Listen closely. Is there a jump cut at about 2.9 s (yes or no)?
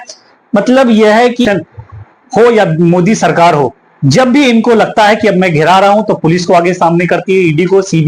no